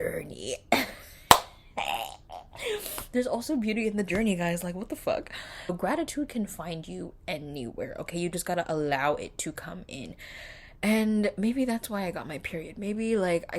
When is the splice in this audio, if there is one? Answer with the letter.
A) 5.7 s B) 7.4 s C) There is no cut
A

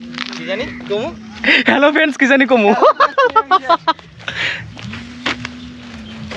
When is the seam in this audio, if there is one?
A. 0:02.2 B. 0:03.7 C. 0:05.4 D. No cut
D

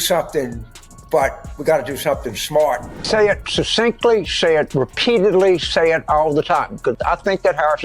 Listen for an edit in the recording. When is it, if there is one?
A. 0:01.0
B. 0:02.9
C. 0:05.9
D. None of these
B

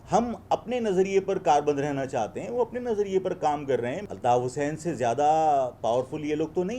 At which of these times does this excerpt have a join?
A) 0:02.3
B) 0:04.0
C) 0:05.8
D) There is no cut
B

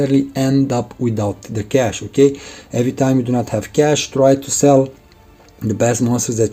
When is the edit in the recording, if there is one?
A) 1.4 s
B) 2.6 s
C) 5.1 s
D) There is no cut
D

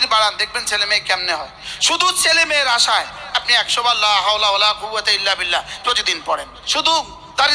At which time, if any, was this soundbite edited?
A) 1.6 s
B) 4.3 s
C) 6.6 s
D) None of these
C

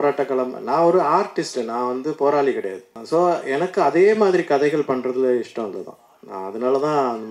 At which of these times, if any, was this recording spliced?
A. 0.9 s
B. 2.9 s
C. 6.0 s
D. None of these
B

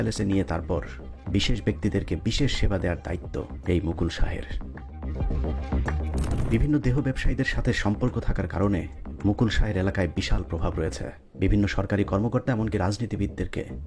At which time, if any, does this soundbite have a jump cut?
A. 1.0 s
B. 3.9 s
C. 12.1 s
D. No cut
D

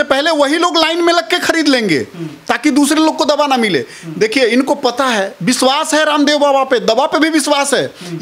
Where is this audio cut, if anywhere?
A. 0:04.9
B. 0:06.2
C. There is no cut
C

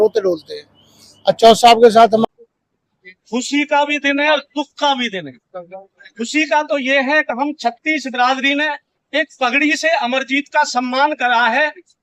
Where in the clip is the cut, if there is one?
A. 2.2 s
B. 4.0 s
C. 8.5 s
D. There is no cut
A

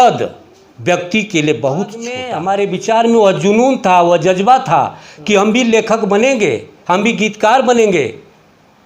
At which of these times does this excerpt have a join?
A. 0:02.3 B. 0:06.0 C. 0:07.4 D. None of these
A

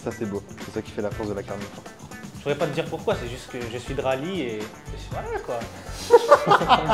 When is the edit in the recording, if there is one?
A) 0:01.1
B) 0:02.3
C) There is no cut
B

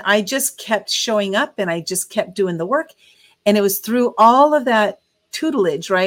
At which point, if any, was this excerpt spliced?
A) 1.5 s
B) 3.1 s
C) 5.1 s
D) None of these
B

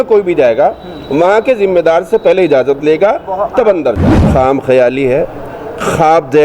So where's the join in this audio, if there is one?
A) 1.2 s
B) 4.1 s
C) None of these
B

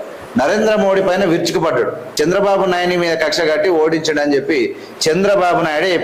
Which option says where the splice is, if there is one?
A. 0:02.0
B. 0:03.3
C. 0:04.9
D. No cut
A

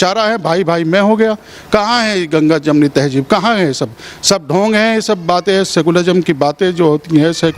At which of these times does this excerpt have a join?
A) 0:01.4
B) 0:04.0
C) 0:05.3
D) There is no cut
D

